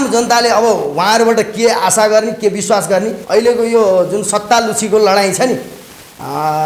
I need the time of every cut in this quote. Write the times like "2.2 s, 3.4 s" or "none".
3.2 s